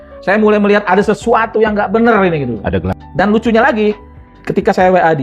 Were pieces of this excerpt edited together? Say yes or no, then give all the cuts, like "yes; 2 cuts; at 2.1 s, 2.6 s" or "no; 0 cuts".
yes; 1 cut; at 3.0 s